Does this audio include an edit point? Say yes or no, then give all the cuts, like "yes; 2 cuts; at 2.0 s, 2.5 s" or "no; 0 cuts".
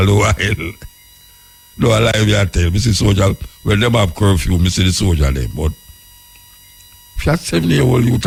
no; 0 cuts